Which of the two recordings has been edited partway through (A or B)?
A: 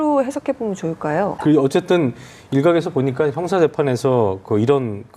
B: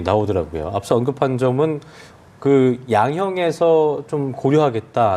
A